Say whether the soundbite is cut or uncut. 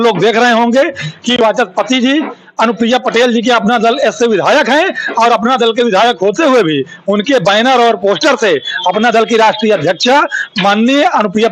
uncut